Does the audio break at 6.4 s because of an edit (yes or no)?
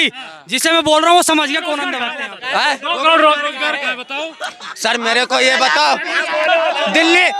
no